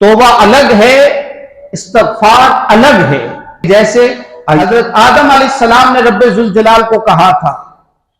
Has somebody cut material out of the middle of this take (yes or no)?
yes